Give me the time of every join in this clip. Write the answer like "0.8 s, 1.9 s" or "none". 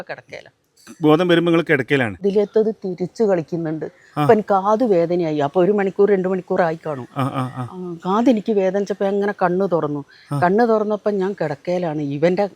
2.2 s